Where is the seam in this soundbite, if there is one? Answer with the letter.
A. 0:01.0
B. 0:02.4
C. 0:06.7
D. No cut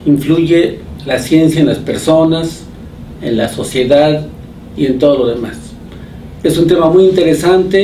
D